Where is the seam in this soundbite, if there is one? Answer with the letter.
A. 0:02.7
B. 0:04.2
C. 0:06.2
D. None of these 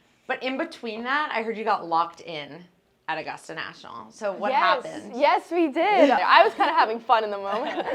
C